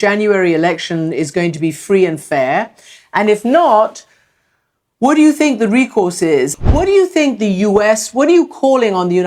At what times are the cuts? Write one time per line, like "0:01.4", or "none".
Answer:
0:06.6